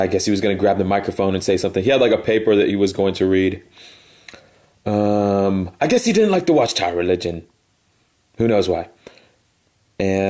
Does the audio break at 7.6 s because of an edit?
no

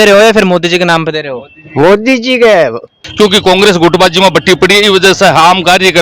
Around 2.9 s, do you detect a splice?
yes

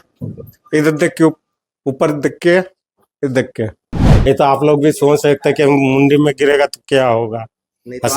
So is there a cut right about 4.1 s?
yes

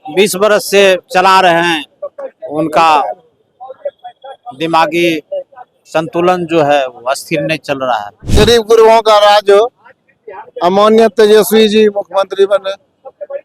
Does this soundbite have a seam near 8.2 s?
yes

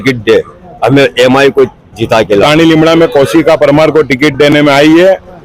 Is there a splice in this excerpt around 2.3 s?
yes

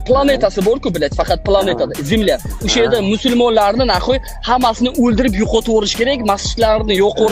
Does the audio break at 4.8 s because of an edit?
no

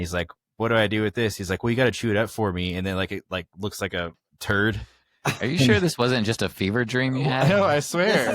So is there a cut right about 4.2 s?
yes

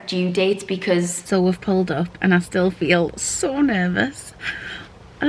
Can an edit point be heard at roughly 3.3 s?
no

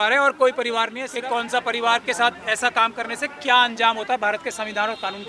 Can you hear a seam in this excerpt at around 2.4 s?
no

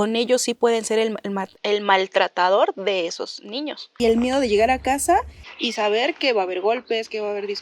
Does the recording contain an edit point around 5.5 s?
no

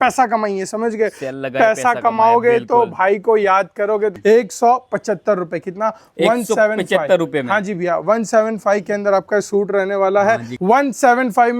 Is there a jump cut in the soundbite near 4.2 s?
yes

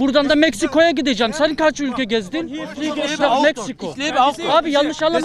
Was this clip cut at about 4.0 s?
no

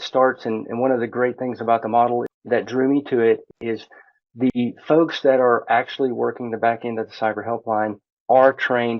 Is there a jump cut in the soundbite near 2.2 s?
yes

